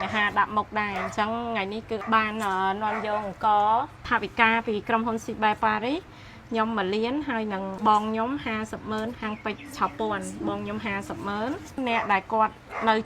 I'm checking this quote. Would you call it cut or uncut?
cut